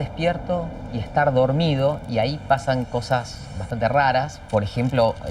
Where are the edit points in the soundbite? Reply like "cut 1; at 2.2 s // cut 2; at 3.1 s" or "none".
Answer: none